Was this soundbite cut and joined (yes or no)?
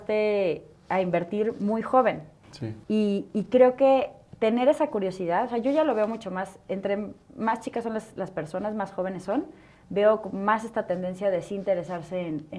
no